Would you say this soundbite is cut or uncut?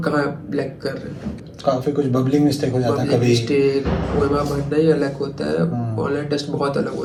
uncut